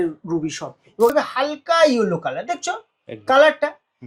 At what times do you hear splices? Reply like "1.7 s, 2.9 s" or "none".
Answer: 1.1 s